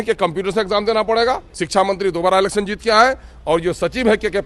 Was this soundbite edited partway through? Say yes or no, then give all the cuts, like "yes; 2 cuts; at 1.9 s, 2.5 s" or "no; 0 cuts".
yes; 1 cut; at 1.5 s